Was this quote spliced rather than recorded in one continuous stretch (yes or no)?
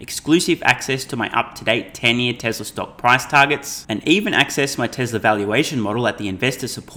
no